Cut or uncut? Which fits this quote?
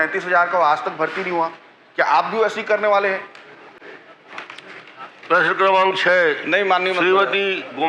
uncut